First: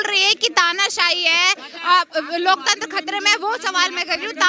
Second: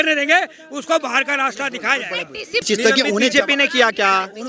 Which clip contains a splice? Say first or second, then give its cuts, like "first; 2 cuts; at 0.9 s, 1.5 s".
second; 1 cut; at 2.7 s